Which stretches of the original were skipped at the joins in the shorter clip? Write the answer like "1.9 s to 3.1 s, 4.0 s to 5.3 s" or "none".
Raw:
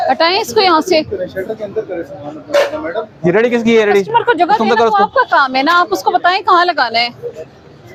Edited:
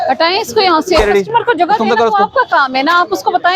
1.0 s to 3.8 s